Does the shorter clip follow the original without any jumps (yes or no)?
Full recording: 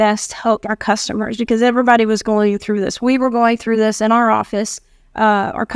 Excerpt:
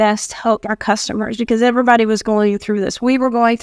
yes